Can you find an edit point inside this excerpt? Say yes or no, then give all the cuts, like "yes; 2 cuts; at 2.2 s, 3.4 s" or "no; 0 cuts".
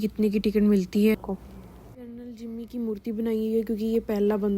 yes; 1 cut; at 1.2 s